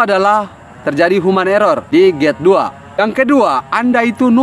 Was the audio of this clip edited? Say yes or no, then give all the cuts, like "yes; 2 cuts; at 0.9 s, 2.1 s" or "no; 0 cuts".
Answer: yes; 2 cuts; at 1.8 s, 2.8 s